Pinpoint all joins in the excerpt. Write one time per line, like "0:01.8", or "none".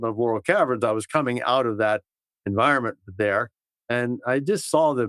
none